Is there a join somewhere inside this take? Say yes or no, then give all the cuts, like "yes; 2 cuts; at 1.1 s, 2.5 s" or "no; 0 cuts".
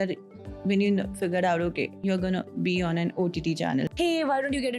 yes; 1 cut; at 3.9 s